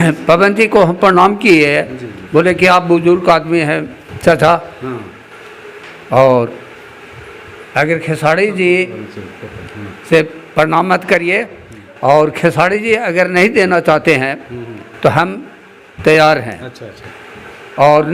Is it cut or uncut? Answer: uncut